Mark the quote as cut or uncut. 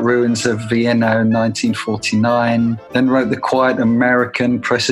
cut